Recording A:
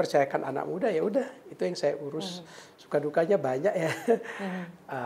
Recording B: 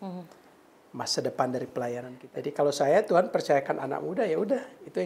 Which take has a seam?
B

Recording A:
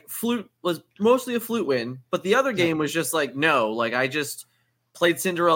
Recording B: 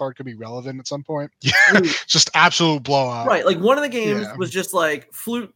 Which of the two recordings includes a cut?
B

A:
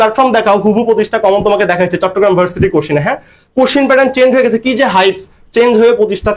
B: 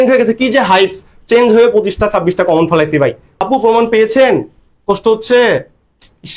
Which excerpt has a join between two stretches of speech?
B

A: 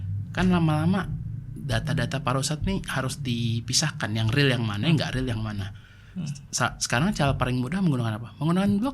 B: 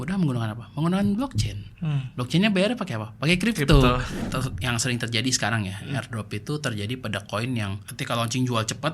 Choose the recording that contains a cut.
B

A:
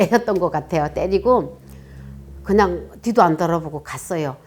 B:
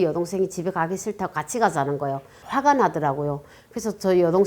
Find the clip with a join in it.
B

